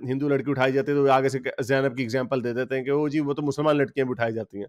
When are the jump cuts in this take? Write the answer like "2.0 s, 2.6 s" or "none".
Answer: none